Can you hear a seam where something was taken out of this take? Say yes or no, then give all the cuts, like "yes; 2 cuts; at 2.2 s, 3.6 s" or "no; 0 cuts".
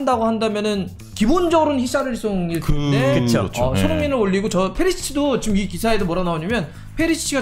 yes; 1 cut; at 1.0 s